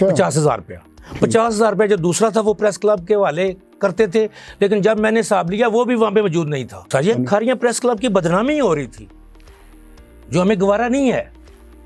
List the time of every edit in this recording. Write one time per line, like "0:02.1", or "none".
0:06.7